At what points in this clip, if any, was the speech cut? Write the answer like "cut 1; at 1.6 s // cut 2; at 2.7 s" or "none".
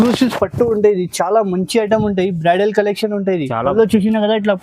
cut 1; at 3.7 s

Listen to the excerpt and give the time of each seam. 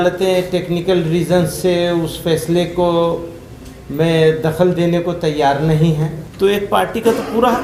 cut 1; at 6.2 s

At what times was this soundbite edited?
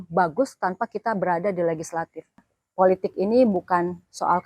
cut 1; at 2.6 s

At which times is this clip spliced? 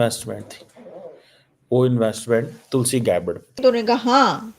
cut 1; at 3.6 s

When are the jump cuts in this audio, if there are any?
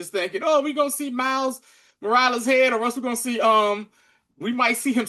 none

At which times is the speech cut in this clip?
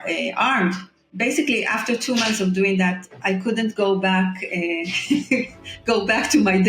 cut 1; at 1.1 s

